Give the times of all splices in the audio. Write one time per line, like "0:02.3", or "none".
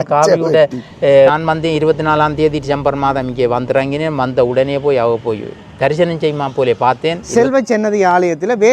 0:01.3
0:07.2